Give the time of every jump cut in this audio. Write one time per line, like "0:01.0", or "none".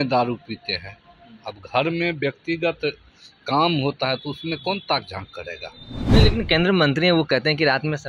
none